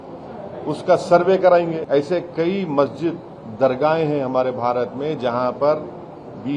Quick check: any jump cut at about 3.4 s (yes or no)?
no